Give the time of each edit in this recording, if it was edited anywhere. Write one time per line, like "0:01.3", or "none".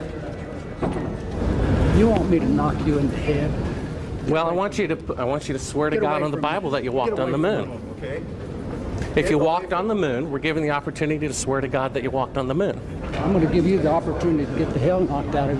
0:01.3